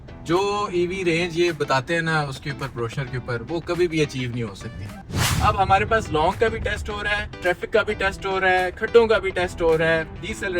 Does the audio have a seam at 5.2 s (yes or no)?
yes